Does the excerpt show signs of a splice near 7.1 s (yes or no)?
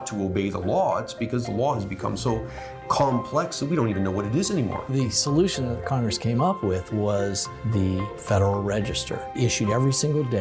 no